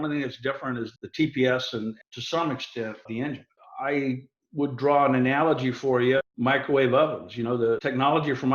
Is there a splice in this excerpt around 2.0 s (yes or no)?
yes